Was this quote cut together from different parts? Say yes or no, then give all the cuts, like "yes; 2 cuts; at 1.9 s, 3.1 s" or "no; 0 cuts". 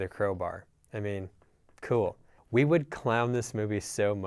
yes; 1 cut; at 2.3 s